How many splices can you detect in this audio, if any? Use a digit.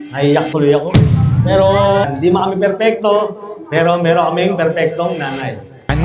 1